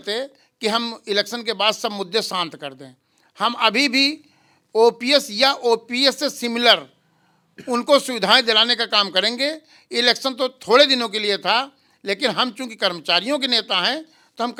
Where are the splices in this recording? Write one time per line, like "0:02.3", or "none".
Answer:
none